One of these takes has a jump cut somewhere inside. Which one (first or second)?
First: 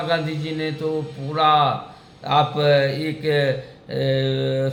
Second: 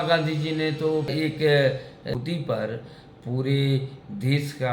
second